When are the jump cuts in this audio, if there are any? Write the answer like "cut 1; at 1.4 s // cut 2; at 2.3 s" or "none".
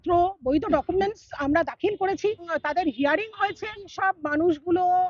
cut 1; at 2.5 s // cut 2; at 3.9 s